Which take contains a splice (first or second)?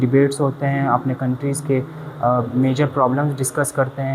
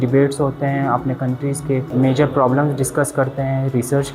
second